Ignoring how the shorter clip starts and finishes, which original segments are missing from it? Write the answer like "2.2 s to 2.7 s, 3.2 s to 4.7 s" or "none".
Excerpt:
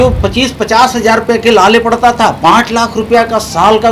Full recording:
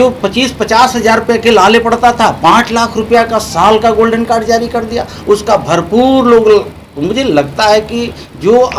none